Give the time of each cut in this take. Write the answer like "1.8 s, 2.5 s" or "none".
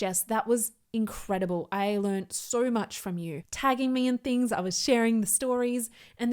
3.3 s